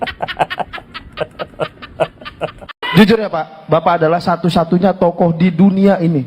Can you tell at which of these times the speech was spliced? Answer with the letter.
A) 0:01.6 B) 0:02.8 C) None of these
B